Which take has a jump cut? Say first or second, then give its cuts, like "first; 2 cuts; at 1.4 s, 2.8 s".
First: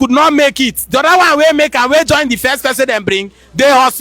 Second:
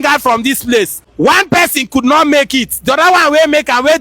second; 1 cut; at 1.0 s